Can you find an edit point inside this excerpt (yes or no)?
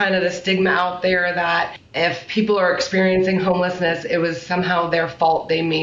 yes